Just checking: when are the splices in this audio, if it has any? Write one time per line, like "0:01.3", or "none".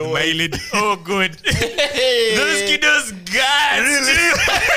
none